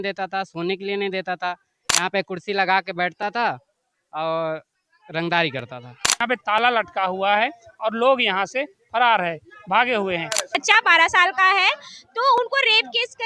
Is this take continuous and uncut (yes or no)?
no